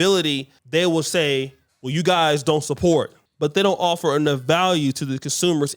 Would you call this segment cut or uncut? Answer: cut